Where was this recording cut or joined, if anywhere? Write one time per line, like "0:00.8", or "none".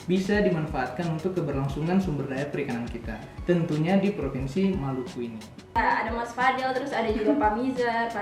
0:05.8